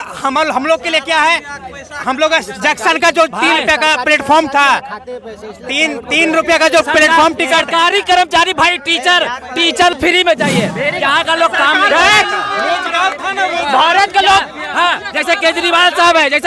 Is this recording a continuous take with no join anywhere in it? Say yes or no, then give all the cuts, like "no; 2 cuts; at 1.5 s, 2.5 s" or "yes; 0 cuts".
no; 1 cut; at 9.9 s